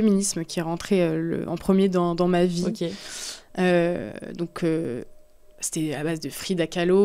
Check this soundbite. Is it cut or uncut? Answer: uncut